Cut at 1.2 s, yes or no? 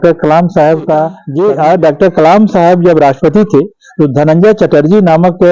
yes